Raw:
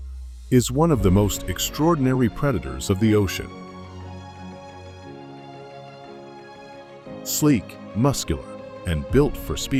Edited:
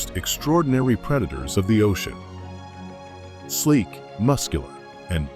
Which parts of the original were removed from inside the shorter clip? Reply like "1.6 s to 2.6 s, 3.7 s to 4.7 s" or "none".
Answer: 3.4 s to 3.7 s, 5.2 s to 7.4 s